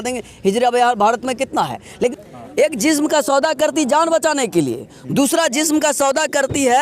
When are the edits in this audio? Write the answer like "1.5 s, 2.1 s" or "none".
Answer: 2.1 s